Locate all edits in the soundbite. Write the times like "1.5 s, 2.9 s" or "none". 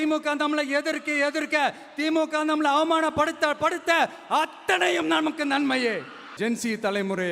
6.2 s